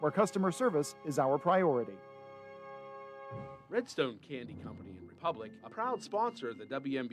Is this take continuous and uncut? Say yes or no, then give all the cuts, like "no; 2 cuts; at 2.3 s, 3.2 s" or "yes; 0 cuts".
no; 1 cut; at 3.5 s